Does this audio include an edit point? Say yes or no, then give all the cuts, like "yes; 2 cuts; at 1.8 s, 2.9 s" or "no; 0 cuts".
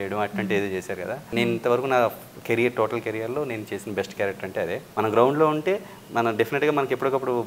yes; 2 cuts; at 1.2 s, 4.8 s